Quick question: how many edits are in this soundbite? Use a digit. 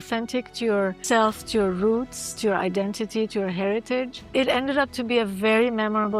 2